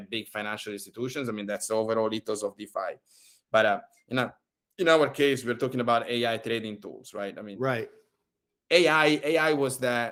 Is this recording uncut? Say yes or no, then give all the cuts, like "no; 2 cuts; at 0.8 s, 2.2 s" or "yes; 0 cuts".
yes; 0 cuts